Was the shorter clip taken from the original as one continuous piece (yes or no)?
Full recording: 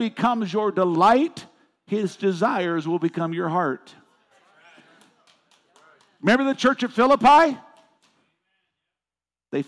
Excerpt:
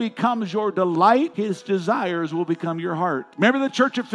no